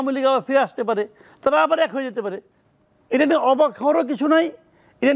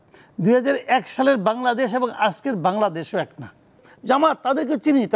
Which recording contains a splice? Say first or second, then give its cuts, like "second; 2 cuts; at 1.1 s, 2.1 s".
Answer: second; 1 cut; at 3.9 s